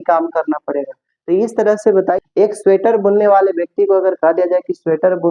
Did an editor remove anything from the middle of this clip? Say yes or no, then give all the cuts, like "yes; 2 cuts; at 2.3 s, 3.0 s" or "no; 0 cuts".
yes; 1 cut; at 2.2 s